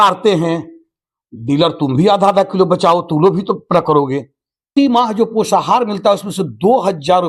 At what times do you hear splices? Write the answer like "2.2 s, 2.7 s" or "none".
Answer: 4.7 s